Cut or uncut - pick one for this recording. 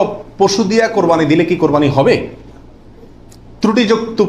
uncut